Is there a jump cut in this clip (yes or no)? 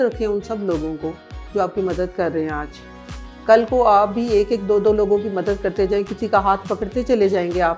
no